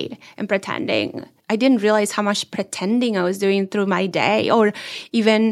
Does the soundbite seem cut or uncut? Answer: uncut